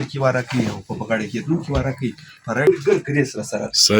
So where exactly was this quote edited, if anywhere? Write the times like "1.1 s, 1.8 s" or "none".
2.7 s